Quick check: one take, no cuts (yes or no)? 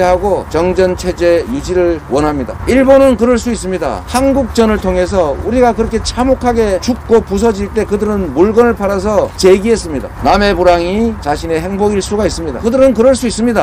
no